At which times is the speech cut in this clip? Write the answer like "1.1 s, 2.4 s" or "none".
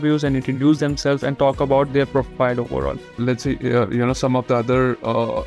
3.2 s